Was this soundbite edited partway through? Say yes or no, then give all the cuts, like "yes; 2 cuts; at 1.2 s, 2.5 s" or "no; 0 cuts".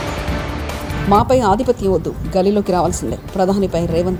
no; 0 cuts